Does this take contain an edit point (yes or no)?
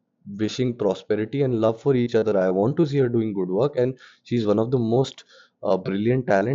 no